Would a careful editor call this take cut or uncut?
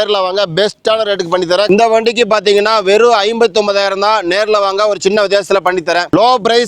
cut